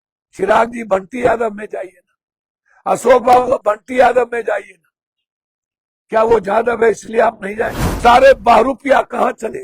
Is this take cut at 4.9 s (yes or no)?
no